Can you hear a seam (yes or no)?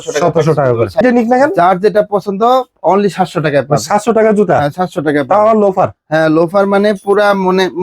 yes